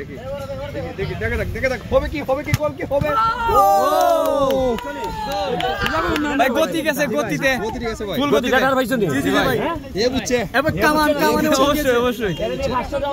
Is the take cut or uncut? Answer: uncut